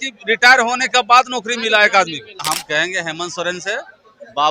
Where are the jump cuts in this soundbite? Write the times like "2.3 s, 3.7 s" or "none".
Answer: 2.4 s

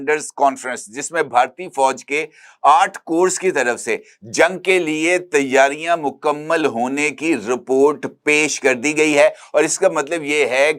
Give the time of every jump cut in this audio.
none

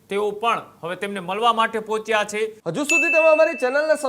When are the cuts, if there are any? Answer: 2.6 s

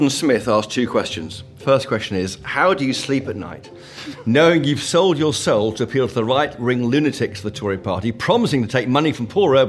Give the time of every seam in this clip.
1.5 s

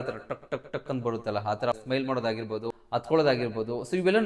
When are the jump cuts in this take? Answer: 2.6 s

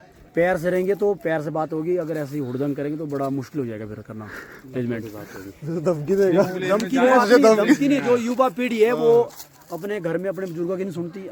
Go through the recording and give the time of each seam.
none

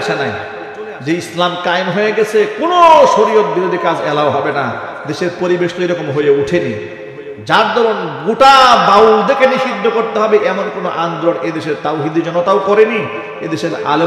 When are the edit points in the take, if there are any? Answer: none

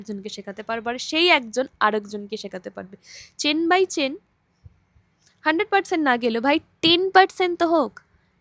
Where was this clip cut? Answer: none

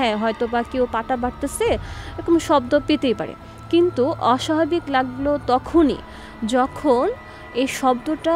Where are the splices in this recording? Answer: none

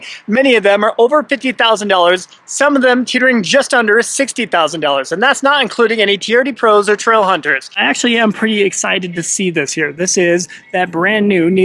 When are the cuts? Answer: 7.8 s

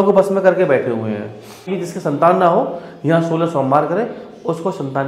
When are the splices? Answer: 1.8 s

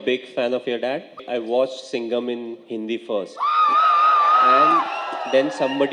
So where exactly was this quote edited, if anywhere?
1.2 s

